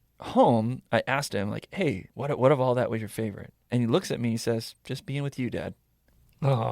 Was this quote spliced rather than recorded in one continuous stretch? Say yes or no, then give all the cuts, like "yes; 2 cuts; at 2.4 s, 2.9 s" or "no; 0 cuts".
yes; 1 cut; at 2.1 s